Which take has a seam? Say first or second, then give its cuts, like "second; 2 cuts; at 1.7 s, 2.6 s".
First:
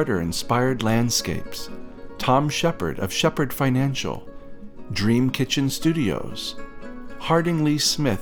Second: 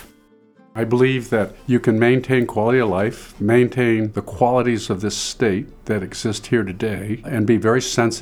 second; 6 cuts; at 0.8 s, 1.6 s, 3.3 s, 4.2 s, 5.7 s, 7.3 s